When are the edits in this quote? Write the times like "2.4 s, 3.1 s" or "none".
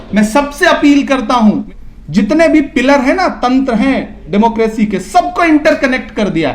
1.6 s